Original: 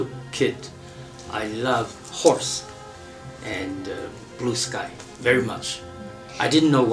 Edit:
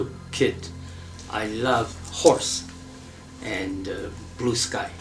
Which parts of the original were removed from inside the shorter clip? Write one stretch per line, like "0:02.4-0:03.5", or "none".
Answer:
none